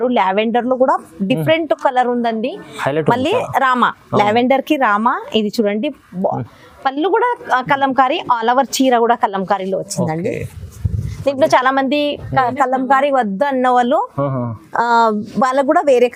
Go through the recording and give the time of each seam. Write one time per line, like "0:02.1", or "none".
none